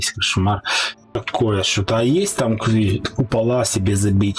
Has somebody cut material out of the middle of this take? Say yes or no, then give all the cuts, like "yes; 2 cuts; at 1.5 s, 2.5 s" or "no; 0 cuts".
yes; 1 cut; at 1.2 s